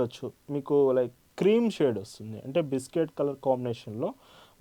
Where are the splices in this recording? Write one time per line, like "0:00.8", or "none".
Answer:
none